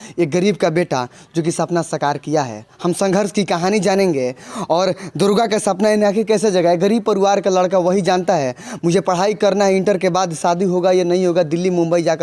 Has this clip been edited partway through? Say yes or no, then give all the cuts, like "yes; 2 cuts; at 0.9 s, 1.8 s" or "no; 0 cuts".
no; 0 cuts